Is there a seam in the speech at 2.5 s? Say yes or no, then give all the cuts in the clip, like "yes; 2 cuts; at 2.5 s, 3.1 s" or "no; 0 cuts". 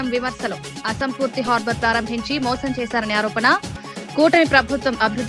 no; 0 cuts